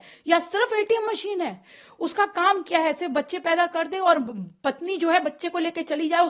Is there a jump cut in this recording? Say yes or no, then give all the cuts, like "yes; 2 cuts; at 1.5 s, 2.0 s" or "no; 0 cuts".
no; 0 cuts